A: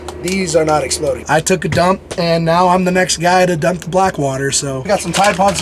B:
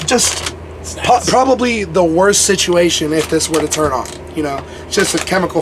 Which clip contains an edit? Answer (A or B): A